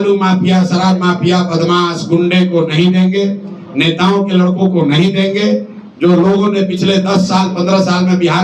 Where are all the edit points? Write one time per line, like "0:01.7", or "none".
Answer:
none